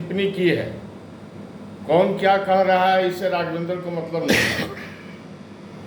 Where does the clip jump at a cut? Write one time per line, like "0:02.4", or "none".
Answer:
none